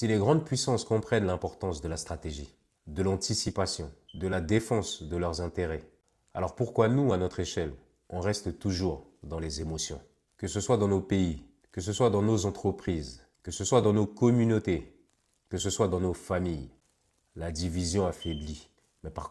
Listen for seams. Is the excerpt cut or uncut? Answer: uncut